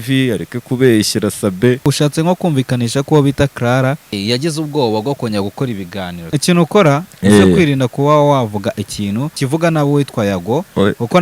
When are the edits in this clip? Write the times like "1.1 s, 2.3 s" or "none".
1.9 s, 4.2 s, 6.3 s, 9.3 s